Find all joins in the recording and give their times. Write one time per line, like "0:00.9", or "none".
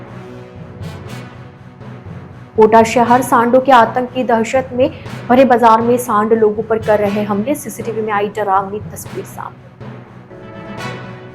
none